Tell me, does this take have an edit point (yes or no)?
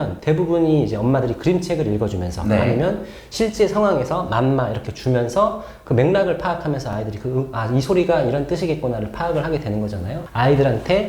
yes